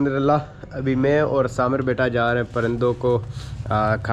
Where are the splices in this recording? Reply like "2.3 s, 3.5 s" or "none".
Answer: none